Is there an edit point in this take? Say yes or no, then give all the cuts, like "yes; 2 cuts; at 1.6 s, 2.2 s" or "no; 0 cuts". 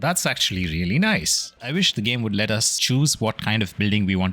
yes; 1 cut; at 1.6 s